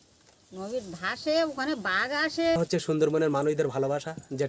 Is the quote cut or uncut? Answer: cut